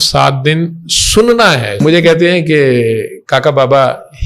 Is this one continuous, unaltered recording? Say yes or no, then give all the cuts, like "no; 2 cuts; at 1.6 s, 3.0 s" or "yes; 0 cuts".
no; 1 cut; at 1.8 s